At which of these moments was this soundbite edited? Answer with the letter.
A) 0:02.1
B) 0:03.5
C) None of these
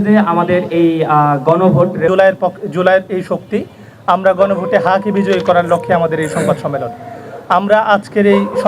A